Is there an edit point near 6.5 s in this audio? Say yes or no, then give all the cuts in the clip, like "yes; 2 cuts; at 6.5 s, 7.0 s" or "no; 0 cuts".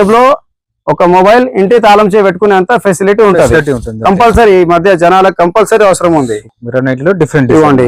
yes; 1 cut; at 6.5 s